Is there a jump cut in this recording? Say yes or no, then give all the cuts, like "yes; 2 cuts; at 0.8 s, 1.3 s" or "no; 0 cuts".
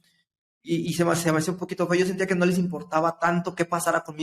no; 0 cuts